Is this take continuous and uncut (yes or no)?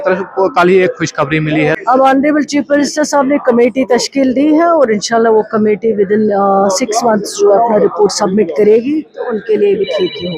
no